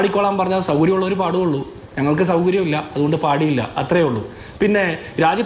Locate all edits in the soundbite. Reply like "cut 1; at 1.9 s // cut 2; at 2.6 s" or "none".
none